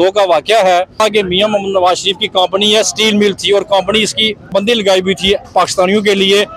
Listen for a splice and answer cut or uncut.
cut